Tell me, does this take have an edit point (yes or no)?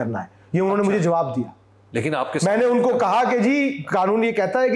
no